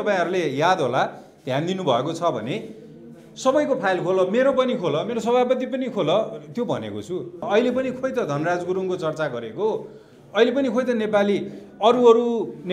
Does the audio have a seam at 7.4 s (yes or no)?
yes